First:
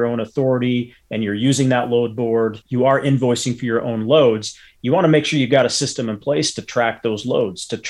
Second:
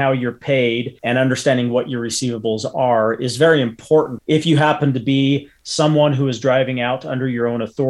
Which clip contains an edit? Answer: second; 2 cuts; at 0.9 s, 4.2 s

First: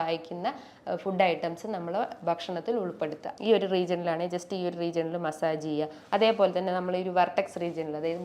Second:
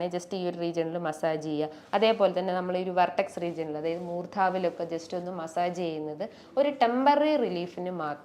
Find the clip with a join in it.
first; 1 cut; at 3.3 s

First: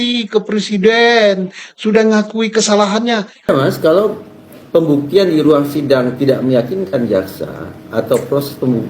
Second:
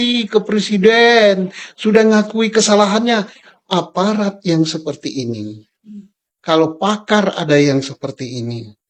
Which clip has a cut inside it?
first; 1 cut; at 3.5 s

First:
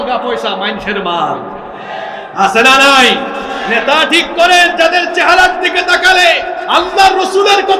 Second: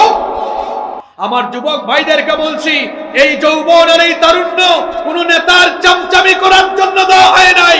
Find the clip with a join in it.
second; 1 cut; at 1.0 s

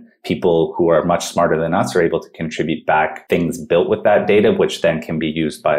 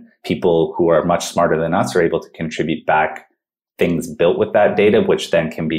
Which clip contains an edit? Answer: first; 1 cut; at 3.2 s

